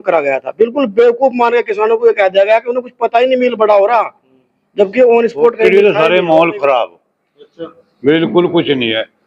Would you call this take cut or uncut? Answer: cut